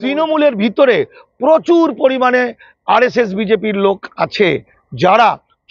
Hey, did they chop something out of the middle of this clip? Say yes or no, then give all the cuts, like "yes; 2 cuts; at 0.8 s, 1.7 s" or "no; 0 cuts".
no; 0 cuts